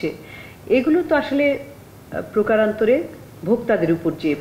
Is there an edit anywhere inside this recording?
no; 0 cuts

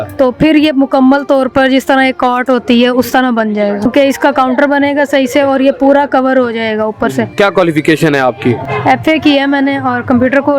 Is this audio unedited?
no; 3 cuts; at 3.9 s, 7.3 s, 8.7 s

